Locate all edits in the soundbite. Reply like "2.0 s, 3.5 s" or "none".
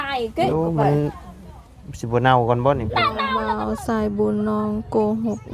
3.3 s

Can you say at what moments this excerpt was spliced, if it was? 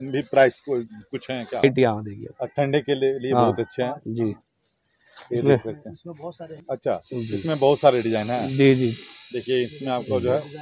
1.6 s

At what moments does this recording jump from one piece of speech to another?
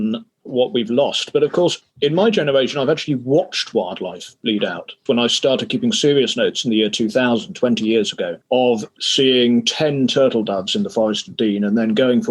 4.9 s

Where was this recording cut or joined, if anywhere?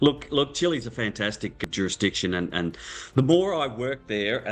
1.6 s

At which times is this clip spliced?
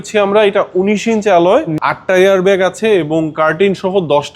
1.8 s

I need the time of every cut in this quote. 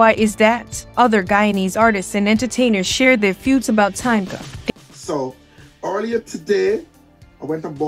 4.5 s

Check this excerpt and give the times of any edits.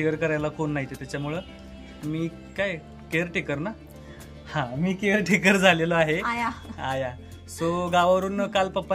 none

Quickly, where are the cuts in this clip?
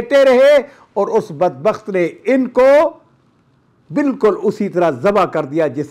none

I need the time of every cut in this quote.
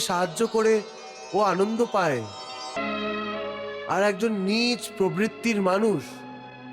2.8 s

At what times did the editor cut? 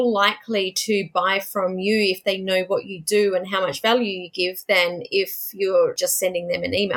6.0 s

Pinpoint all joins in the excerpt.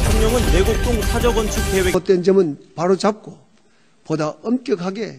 2.0 s

